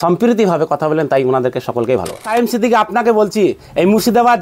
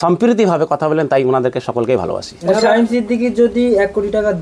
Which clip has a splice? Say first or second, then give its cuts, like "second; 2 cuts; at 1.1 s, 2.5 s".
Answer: first; 1 cut; at 2.5 s